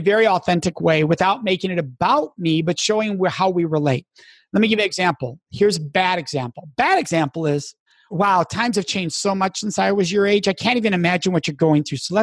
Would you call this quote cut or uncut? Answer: cut